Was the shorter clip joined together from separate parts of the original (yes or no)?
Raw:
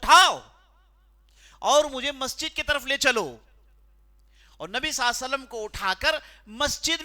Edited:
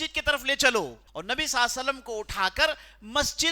yes